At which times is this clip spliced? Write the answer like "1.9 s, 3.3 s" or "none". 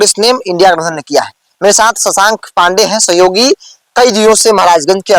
none